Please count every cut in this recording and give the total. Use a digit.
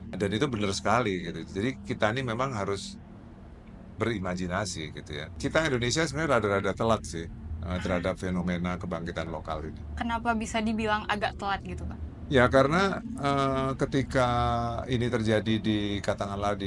1